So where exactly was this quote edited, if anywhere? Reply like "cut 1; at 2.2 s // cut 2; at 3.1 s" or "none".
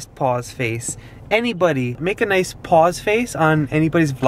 cut 1; at 2.0 s